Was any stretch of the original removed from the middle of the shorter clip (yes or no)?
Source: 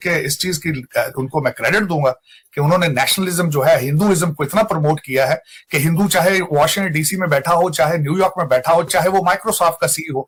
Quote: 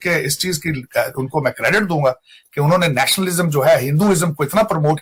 no